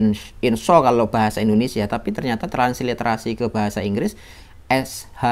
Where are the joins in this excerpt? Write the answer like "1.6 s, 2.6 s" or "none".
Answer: none